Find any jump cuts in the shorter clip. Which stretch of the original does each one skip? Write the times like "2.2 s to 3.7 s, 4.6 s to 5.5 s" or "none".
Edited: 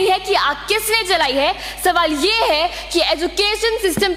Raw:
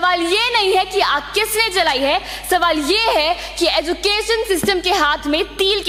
none